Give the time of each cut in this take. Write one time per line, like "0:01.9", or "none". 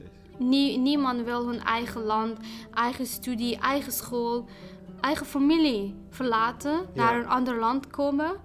none